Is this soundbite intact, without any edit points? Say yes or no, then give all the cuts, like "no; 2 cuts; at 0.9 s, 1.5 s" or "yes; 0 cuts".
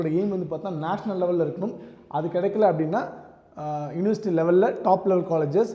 yes; 0 cuts